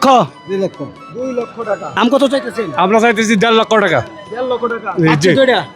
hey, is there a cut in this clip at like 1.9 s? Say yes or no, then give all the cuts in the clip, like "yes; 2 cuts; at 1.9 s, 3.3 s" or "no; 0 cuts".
yes; 1 cut; at 1.9 s